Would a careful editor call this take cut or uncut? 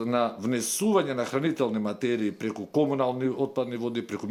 uncut